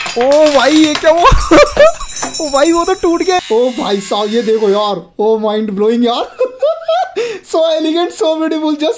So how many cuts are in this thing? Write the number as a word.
one